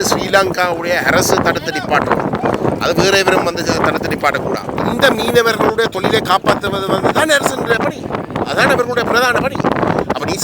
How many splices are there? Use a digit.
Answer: 1